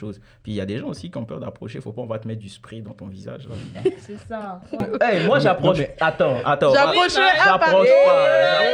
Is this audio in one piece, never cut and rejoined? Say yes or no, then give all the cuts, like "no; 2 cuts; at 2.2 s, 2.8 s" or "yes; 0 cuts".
no; 1 cut; at 4.8 s